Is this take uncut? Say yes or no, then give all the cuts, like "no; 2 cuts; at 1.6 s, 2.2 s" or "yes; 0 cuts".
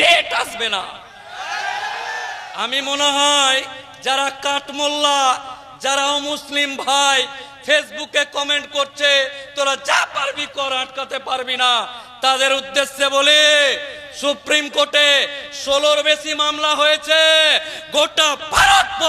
no; 1 cut; at 2.3 s